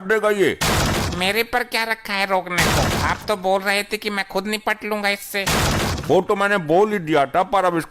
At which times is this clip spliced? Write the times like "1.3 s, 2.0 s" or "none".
none